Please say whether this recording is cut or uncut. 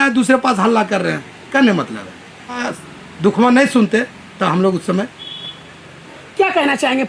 cut